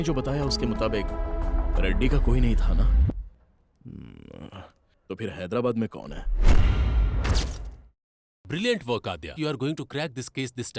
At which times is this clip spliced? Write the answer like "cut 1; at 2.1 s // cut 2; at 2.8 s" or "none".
cut 1; at 8.0 s // cut 2; at 9.4 s